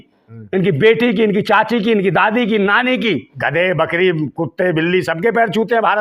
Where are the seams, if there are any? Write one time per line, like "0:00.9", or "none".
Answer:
0:03.3

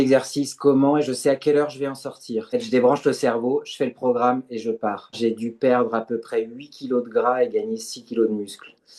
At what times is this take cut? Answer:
0:02.5
0:05.1

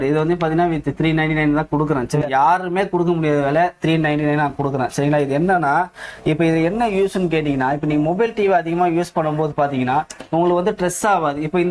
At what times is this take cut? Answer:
0:02.2

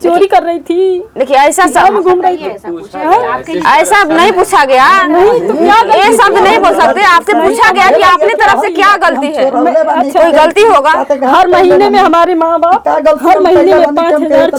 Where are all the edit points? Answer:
none

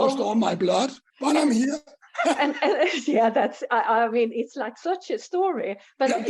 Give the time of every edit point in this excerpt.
0:01.0

